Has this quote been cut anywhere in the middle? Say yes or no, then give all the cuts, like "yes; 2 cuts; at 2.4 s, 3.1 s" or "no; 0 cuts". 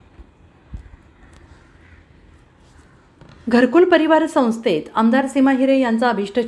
yes; 1 cut; at 0.9 s